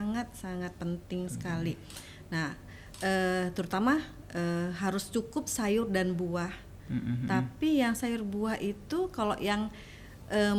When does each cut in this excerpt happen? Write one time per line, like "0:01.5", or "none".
none

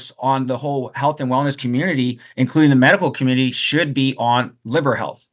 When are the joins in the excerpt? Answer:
none

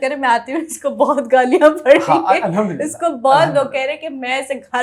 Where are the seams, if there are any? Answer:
none

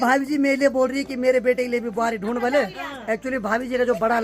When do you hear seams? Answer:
none

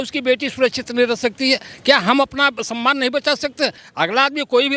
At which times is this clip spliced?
0:03.8

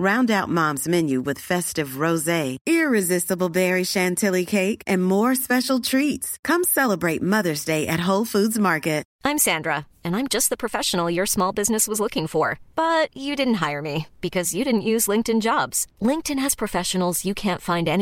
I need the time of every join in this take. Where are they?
0:09.1

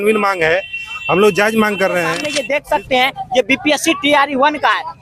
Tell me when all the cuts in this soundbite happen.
0:02.3

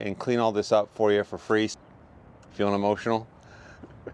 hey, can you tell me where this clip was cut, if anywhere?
0:01.7

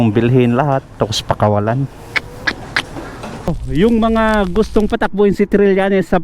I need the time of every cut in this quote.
0:03.2

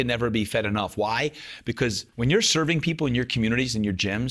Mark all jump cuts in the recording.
0:02.1

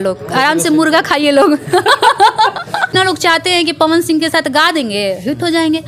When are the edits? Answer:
0:02.9

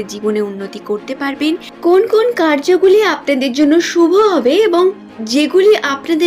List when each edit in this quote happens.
0:01.8

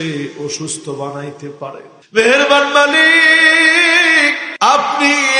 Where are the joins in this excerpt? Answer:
0:01.9
0:04.4

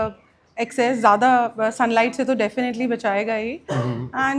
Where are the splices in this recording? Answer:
none

